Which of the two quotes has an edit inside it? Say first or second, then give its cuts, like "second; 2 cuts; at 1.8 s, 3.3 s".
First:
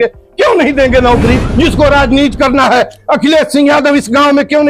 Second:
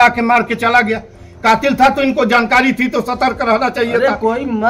first; 1 cut; at 1.5 s